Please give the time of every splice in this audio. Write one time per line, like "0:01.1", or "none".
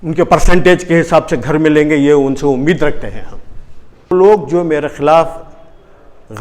0:04.1